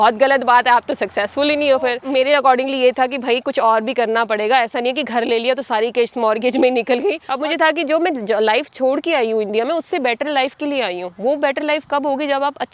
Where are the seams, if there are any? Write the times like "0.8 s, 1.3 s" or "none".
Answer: 2.0 s, 7.3 s